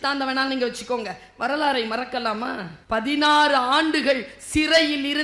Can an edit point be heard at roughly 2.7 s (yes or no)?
yes